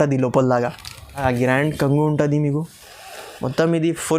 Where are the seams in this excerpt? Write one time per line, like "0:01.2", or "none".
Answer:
0:01.2